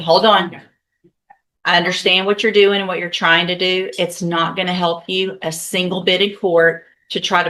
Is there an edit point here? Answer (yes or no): no